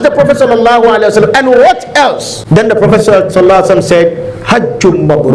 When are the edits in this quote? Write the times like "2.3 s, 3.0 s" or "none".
2.3 s